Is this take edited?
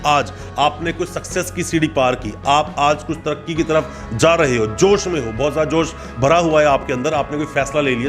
no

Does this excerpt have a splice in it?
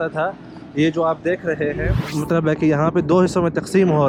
yes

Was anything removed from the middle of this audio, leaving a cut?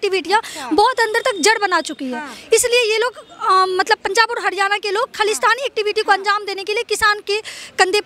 no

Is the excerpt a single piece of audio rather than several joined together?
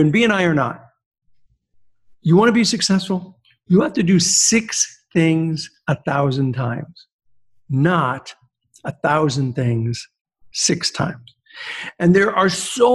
yes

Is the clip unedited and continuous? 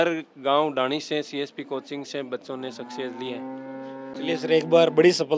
yes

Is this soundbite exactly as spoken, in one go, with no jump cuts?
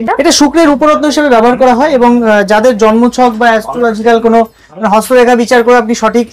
yes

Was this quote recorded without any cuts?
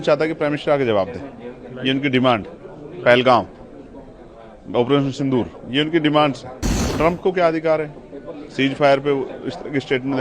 no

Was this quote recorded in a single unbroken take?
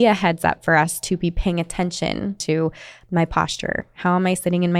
no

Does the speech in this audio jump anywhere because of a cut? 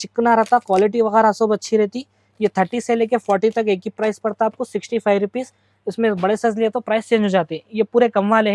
no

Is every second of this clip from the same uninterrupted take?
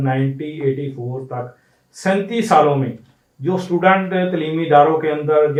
yes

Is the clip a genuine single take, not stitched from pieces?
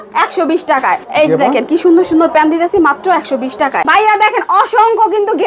no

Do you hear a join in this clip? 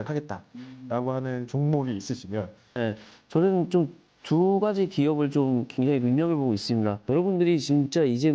yes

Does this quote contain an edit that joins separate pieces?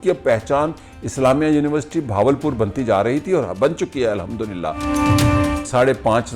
yes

